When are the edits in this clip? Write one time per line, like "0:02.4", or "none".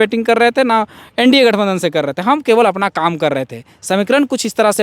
none

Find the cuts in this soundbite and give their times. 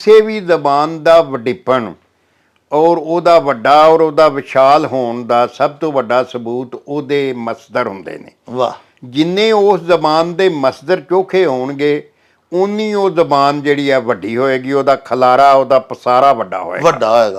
none

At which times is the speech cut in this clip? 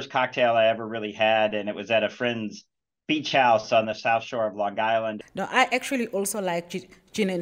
0:05.2

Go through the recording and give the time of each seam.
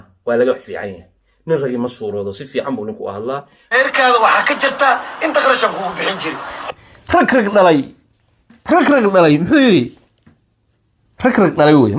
0:03.5

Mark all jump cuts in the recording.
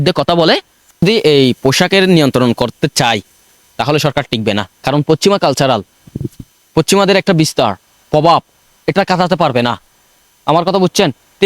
0:01.0

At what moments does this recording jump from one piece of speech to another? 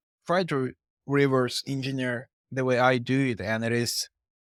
none

